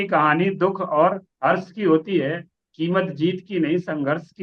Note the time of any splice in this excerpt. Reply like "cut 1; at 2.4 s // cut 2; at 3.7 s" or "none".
none